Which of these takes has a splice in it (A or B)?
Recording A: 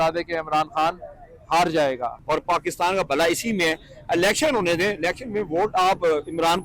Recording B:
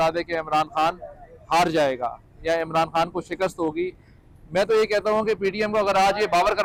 A